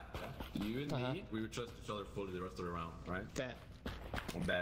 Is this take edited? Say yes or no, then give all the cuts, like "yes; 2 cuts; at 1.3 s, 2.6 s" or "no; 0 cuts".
no; 0 cuts